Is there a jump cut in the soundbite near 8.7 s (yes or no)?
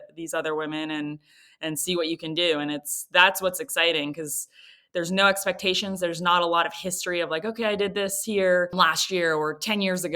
yes